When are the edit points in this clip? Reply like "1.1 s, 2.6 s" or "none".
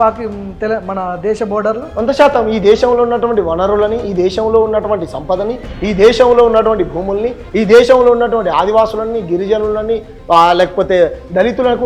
none